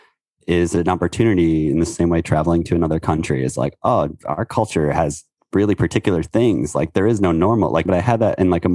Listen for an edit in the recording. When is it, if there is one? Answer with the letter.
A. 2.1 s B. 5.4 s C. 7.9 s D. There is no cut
C